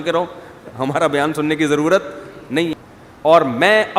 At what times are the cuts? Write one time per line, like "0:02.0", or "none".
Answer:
0:02.8